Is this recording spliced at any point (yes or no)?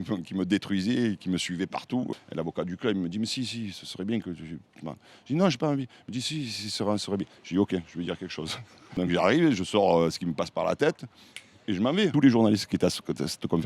yes